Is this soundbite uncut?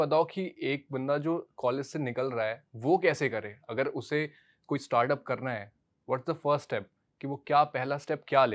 yes; 0 cuts

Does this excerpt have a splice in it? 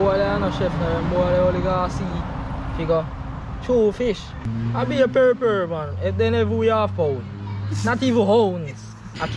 yes; 1 cut; at 4.5 s

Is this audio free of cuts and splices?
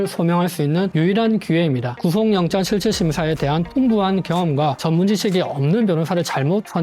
no; 1 cut; at 1.9 s

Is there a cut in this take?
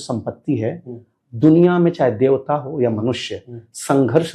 no; 0 cuts

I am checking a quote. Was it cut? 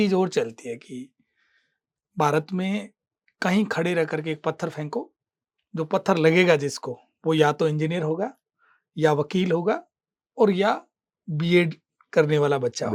no; 0 cuts

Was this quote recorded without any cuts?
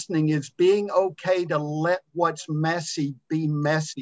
yes; 0 cuts

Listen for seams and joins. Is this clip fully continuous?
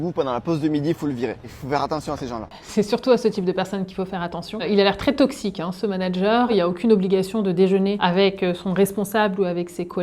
no; 4 cuts; at 1.5 s, 2.6 s, 6.5 s, 8.0 s

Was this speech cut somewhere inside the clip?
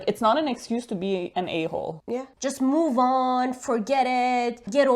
yes; 1 cut; at 2.3 s

